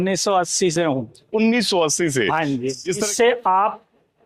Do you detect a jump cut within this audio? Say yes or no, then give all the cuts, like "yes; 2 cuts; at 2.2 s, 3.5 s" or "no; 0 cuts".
yes; 1 cut; at 3.1 s